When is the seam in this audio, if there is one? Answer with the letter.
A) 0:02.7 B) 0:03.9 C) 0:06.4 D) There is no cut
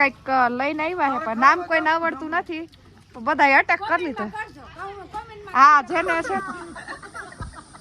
C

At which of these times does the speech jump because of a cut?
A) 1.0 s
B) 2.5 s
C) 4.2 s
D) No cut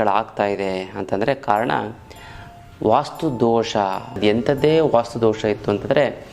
C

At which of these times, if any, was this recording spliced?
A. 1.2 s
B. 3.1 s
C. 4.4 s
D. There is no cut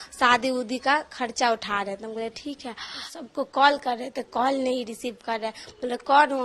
B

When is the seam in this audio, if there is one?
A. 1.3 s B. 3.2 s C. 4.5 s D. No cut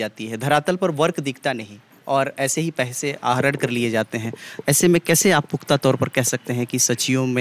D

